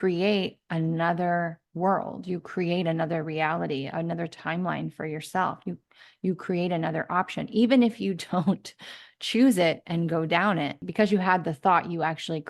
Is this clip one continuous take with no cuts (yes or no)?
no